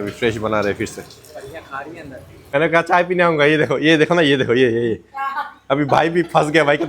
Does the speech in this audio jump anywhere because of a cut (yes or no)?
yes